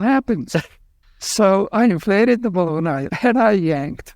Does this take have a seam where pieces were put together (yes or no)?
yes